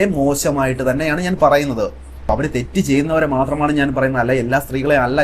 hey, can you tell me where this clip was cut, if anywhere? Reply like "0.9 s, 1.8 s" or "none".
none